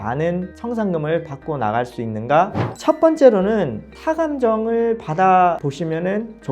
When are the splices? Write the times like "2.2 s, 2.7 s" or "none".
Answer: 2.6 s